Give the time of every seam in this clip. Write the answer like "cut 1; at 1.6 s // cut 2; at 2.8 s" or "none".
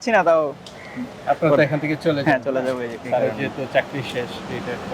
none